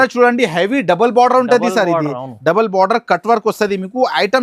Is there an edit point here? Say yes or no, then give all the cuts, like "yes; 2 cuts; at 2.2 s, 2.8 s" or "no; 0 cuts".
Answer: no; 0 cuts